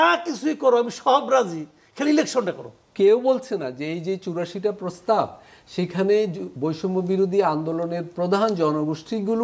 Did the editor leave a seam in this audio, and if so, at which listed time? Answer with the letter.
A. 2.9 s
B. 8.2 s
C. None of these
A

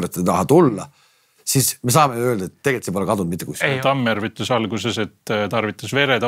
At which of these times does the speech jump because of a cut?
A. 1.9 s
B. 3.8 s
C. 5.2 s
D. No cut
B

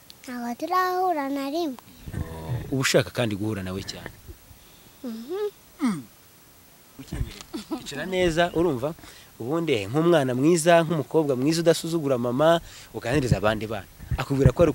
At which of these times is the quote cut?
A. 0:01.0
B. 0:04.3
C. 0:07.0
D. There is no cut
C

